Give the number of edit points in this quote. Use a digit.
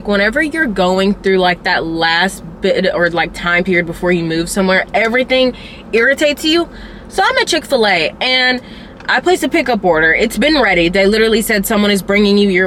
0